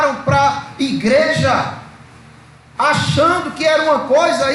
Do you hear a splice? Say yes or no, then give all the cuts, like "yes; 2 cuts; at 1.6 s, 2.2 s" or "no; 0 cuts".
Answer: no; 0 cuts